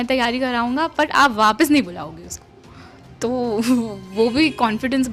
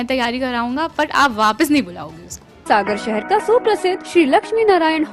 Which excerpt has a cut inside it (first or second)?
second